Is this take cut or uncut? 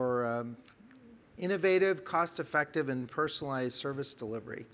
uncut